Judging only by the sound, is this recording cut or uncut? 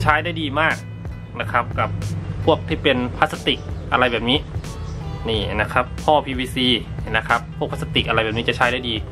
uncut